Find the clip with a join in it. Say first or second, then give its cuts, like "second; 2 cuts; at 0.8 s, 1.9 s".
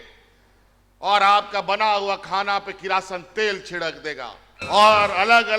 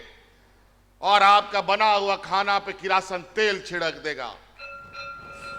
first; 1 cut; at 4.5 s